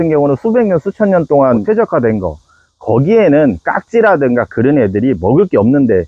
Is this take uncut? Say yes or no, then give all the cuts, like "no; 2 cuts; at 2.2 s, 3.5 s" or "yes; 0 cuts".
no; 1 cut; at 1.6 s